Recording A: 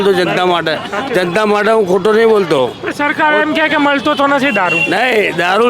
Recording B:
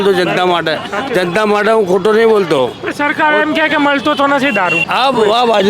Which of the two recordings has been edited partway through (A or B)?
B